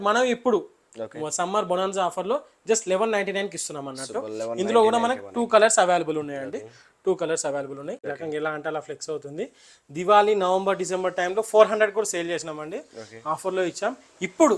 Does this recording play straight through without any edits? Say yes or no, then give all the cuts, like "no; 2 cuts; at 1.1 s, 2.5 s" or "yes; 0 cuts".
no; 1 cut; at 8.1 s